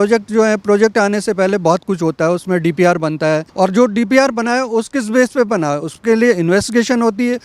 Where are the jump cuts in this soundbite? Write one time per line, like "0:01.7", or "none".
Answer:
0:03.5